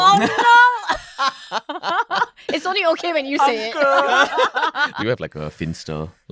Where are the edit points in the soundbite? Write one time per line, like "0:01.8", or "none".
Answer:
0:04.9